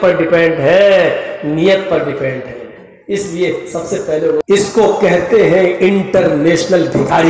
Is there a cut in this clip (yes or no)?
yes